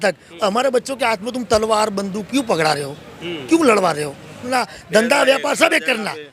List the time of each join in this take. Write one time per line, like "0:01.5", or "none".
0:04.4

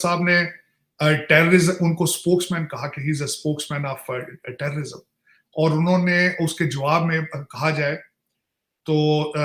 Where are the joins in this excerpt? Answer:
none

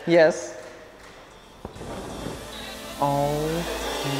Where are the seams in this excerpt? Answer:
0:01.7

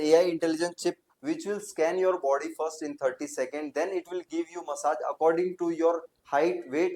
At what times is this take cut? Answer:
none

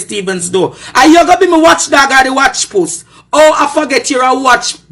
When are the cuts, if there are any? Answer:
none

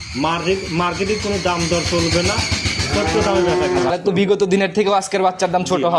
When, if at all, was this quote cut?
0:03.9

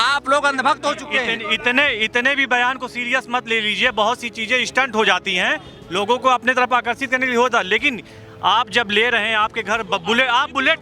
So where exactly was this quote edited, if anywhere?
none

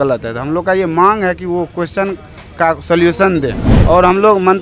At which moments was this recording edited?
0:03.7

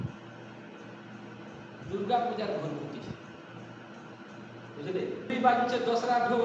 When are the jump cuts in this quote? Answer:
0:05.3

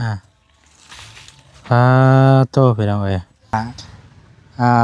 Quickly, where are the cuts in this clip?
0:03.5

